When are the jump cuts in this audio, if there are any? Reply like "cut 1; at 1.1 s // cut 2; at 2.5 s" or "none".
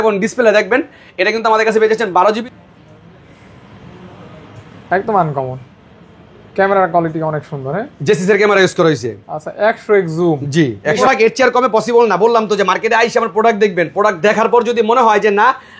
cut 1; at 2.5 s // cut 2; at 11.0 s